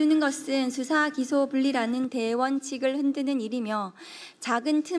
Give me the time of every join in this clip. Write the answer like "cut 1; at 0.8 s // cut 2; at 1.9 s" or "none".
none